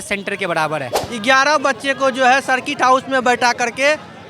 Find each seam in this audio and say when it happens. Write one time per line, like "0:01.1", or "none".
0:01.0